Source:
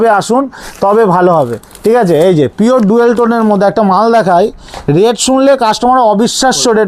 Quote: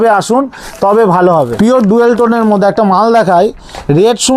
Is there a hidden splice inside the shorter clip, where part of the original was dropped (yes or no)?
yes